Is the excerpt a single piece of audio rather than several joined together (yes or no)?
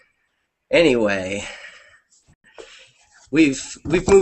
no